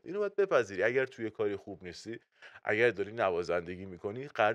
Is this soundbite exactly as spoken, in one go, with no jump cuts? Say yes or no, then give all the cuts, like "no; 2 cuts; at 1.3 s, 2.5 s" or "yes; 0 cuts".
yes; 0 cuts